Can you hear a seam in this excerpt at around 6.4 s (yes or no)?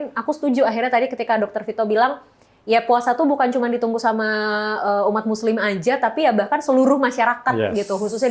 no